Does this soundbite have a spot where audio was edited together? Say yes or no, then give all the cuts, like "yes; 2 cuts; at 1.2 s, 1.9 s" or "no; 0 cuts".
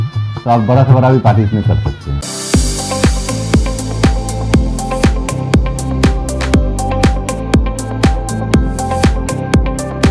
yes; 1 cut; at 2.2 s